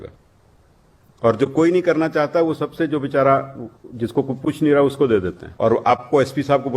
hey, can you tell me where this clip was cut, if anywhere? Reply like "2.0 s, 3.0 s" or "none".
5.4 s

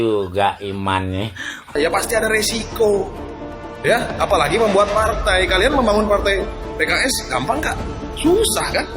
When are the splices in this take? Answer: 1.7 s

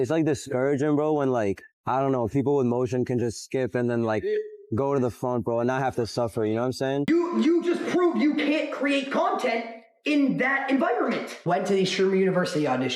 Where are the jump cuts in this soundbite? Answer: 7.1 s, 11.3 s

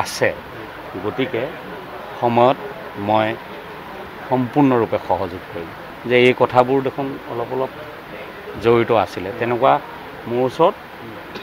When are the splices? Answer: 5.9 s

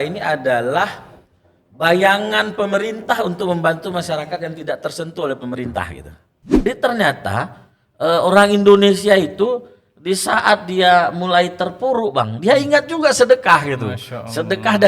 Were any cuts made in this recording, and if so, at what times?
6.6 s

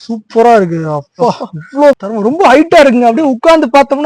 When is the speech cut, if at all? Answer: 2.0 s

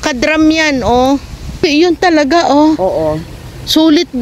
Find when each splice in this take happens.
1.7 s

